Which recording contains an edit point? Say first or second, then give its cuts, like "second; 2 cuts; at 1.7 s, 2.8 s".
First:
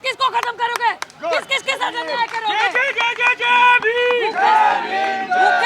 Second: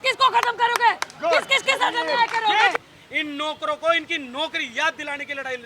second; 1 cut; at 2.8 s